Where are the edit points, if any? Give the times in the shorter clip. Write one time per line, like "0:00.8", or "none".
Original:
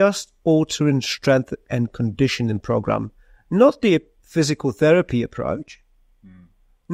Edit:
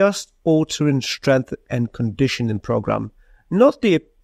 none